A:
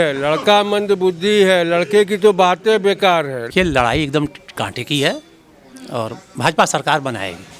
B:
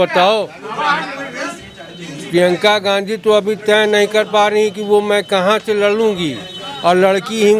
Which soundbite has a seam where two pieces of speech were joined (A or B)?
A